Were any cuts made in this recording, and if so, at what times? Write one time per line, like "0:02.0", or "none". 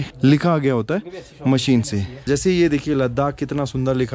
0:02.3